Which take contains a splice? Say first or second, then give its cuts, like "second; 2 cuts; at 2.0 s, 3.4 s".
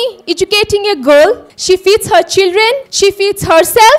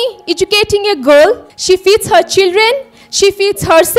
first; 1 cut; at 2.9 s